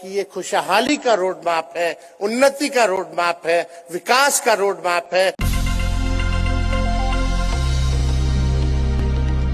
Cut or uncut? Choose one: cut